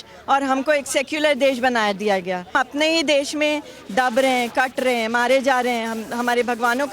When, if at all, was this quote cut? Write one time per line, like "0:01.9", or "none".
0:02.5